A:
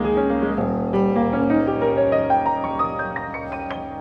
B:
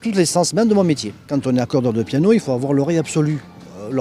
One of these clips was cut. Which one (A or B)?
B